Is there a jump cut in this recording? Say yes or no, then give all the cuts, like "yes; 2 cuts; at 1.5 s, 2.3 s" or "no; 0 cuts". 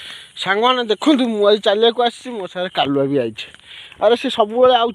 no; 0 cuts